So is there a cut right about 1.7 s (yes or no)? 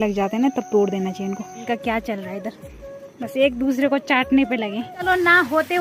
yes